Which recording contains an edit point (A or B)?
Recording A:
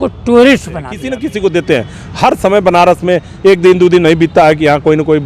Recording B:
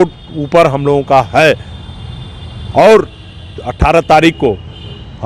A